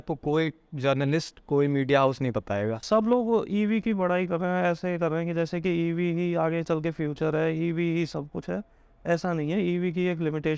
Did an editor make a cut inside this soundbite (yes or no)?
no